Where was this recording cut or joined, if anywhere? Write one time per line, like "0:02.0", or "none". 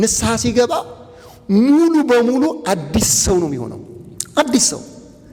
none